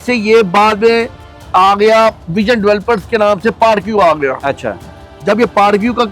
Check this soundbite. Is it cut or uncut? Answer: uncut